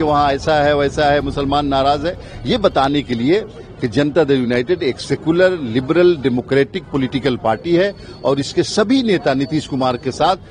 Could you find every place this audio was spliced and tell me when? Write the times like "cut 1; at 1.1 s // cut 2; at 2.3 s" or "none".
none